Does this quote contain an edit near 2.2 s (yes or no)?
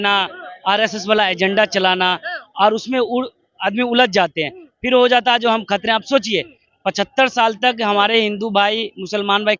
no